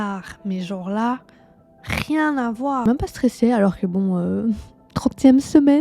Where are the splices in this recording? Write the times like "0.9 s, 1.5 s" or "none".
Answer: 2.9 s